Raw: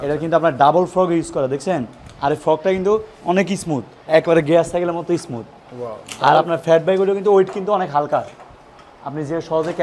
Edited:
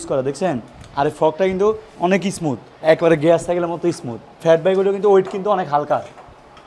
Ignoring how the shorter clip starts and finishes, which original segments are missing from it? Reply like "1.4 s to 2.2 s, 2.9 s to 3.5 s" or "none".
5.6 s to 6.6 s